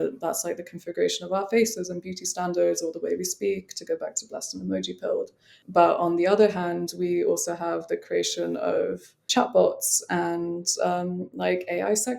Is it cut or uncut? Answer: cut